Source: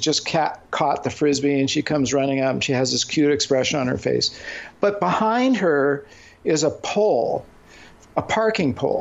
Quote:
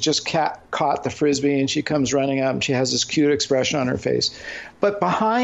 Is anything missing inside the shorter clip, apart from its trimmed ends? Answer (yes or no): no